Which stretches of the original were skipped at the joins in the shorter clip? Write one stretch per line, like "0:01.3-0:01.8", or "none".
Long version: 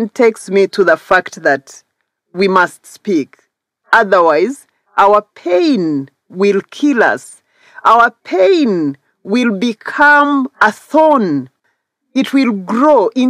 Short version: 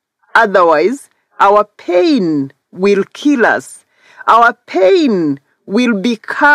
none